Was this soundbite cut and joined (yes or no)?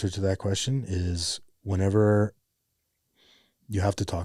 no